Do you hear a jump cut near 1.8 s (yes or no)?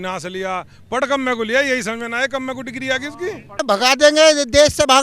no